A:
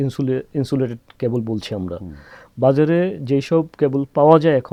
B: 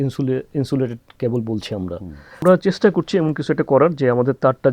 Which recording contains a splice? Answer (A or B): B